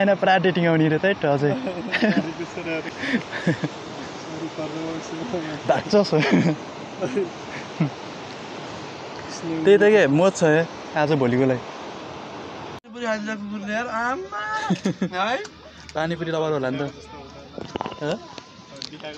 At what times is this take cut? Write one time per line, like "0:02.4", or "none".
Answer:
0:02.8
0:12.9